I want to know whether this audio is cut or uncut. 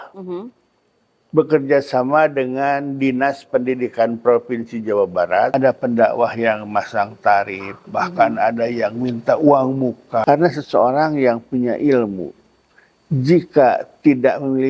cut